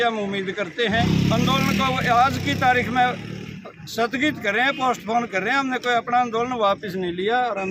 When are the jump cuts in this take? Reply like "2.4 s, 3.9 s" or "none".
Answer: 1.0 s